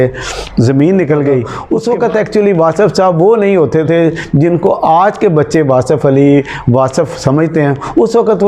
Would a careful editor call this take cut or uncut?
cut